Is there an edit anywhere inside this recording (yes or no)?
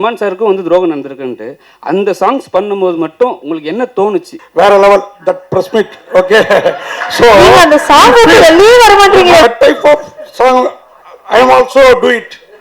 yes